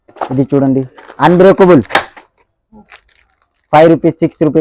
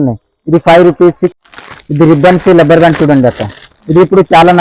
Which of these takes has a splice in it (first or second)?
second